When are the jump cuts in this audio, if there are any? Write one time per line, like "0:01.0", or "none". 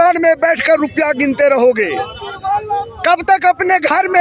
none

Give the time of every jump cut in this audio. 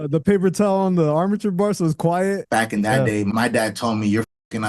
0:02.4
0:03.3

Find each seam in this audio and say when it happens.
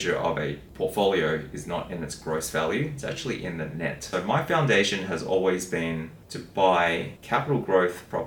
0:04.0
0:07.1

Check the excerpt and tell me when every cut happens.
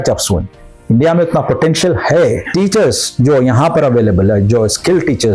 0:02.4

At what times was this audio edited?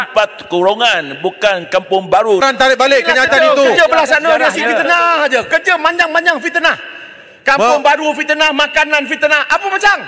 0:02.4

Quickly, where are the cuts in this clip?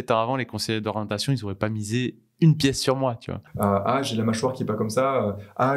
0:03.4

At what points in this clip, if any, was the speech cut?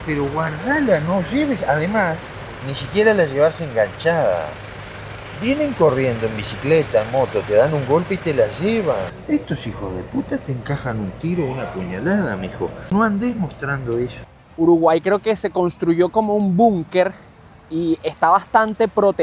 0:09.1
0:12.9
0:14.2

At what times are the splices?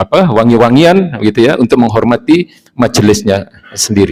none

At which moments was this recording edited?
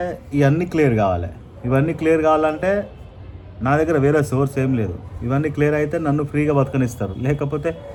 none

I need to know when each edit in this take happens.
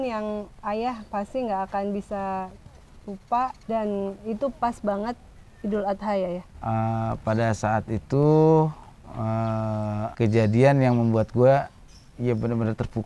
0:03.6
0:06.5
0:10.1

